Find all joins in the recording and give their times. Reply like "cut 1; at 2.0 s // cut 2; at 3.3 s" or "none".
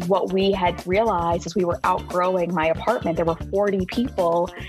none